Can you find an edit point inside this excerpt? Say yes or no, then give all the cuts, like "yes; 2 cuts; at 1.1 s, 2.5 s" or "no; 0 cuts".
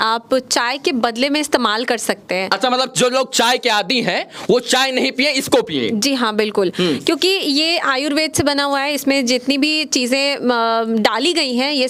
no; 0 cuts